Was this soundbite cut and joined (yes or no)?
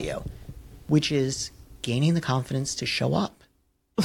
no